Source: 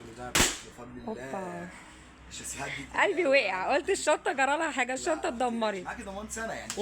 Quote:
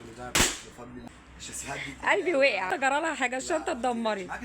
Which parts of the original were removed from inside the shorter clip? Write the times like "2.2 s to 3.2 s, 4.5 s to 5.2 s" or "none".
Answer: 1.0 s to 1.9 s, 3.7 s to 4.3 s